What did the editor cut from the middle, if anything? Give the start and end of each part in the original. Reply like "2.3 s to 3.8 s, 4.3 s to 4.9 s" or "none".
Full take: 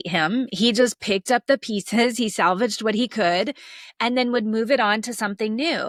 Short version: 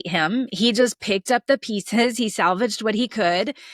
none